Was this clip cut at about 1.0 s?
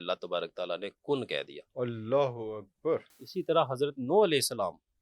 no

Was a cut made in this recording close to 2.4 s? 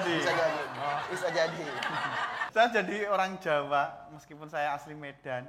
yes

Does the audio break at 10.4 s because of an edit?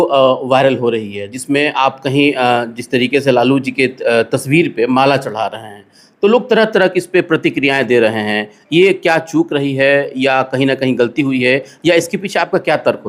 no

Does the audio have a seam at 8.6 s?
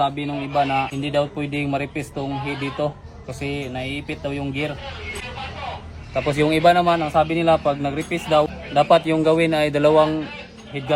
yes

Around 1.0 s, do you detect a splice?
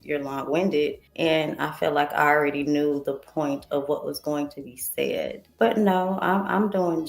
yes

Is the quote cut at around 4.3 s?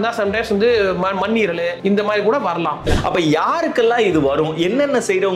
no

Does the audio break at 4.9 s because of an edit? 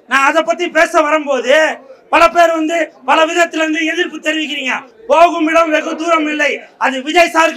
yes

